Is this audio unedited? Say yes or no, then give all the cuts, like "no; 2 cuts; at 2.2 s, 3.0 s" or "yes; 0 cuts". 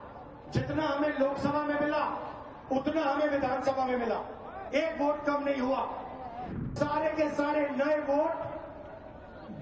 no; 1 cut; at 6.7 s